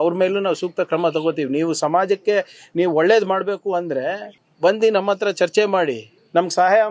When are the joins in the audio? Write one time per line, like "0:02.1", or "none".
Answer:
none